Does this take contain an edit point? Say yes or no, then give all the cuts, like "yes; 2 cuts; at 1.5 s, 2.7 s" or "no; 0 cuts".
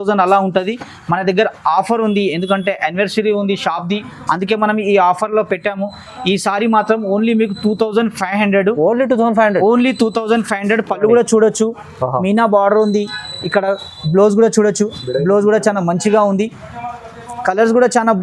no; 0 cuts